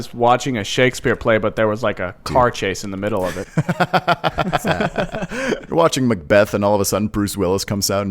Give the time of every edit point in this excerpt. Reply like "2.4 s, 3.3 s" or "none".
5.7 s